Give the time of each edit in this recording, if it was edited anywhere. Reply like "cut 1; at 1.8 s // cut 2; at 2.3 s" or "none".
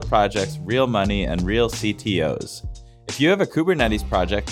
none